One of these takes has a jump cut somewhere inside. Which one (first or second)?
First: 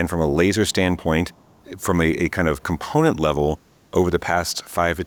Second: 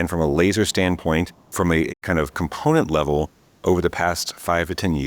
second